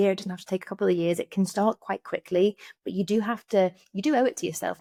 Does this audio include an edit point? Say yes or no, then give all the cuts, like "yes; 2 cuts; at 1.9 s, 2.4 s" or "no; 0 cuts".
no; 0 cuts